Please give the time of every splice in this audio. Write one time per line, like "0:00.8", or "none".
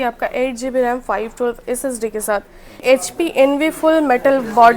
0:02.8